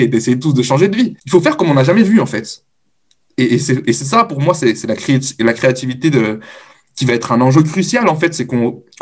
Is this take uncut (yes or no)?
no